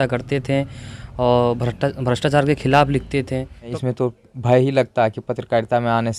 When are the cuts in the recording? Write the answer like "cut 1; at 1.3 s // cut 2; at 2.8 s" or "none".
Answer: cut 1; at 3.8 s